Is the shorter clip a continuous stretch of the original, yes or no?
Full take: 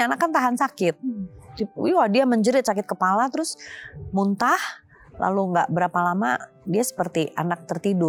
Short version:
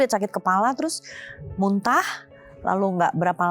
yes